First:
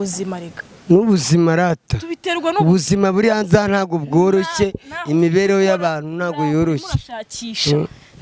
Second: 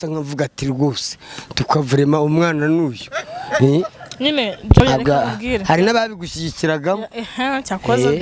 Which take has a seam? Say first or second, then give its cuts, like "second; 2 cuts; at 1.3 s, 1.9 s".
second; 1 cut; at 4.8 s